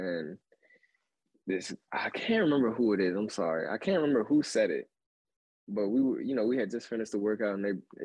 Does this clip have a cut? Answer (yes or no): no